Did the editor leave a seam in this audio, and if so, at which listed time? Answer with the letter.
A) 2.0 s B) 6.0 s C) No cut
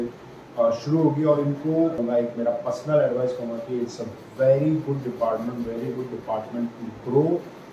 A